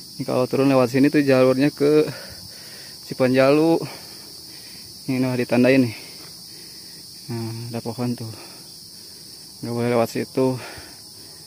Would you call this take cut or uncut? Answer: uncut